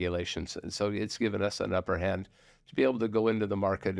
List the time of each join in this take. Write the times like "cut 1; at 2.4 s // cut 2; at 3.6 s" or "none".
none